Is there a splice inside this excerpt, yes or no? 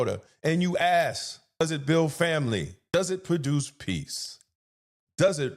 yes